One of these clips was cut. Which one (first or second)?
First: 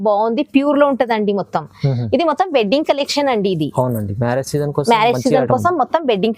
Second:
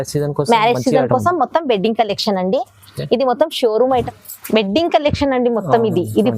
second